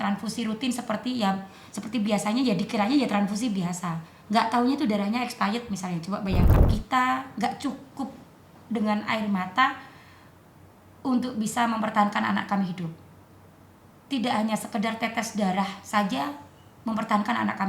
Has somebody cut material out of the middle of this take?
yes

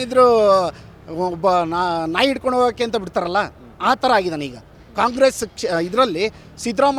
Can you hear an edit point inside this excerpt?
no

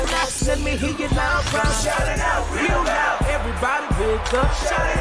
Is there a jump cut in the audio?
no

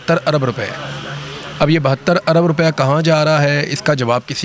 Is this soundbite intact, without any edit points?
yes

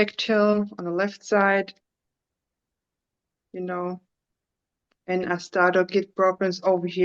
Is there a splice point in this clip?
no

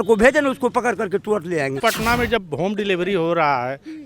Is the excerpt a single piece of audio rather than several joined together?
no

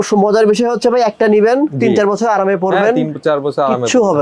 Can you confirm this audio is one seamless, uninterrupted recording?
yes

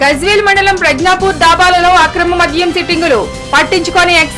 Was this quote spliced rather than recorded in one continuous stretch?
no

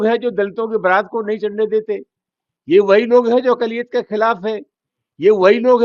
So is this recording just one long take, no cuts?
yes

